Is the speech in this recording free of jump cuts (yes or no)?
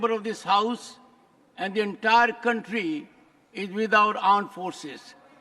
yes